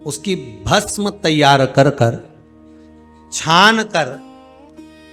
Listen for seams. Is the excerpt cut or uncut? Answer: uncut